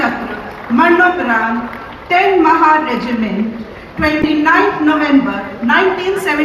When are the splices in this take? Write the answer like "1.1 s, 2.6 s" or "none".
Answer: none